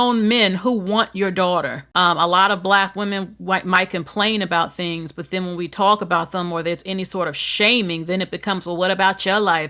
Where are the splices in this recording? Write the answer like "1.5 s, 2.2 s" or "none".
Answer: 1.8 s